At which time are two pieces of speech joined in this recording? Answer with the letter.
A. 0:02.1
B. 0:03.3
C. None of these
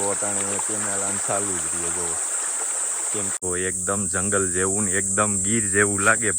B